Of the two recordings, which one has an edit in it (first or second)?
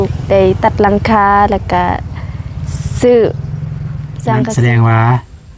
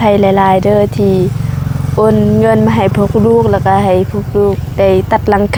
first